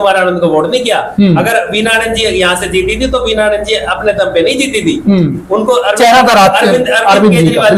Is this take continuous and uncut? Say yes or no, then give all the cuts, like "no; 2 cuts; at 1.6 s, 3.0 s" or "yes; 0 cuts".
yes; 0 cuts